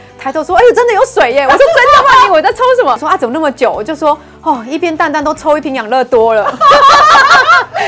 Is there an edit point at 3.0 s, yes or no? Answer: yes